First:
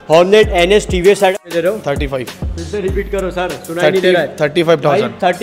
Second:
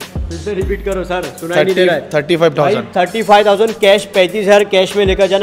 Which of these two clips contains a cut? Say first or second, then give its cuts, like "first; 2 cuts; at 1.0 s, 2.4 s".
first; 1 cut; at 1.3 s